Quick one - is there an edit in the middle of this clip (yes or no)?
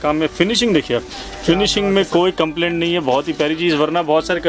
no